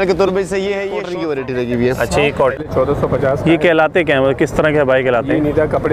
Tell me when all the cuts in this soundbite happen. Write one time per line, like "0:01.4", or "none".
0:01.1
0:02.6